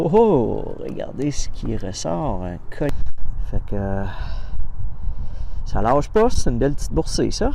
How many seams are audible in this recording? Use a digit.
1